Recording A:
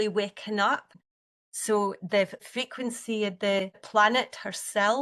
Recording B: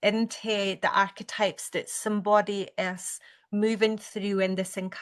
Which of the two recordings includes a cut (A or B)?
A